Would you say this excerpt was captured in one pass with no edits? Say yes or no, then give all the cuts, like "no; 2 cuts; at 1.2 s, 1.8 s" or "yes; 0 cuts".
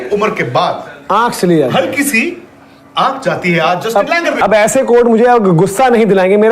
no; 1 cut; at 4.4 s